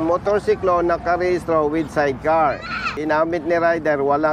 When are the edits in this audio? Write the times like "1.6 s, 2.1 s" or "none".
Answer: 2.9 s